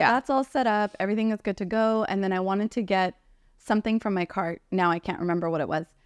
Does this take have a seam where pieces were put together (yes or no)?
no